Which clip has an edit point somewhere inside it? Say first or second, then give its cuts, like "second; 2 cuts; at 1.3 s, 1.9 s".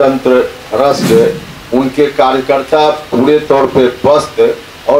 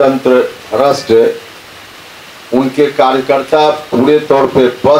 first; 1 cut; at 1.5 s